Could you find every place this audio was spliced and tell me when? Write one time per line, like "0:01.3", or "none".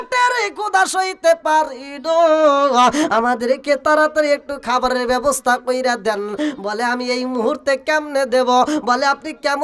none